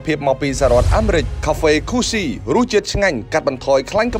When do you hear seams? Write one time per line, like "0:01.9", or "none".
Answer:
0:01.3